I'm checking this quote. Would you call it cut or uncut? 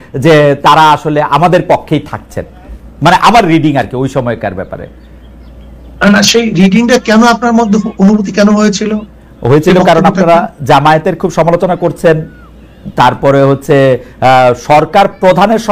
uncut